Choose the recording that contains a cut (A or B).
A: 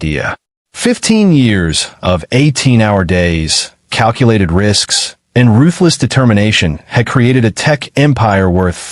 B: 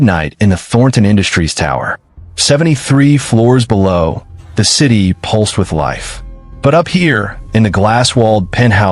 B